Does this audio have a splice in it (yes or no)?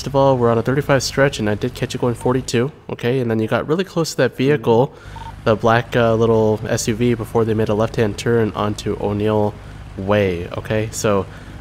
no